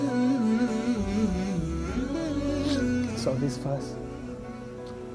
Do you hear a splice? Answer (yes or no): yes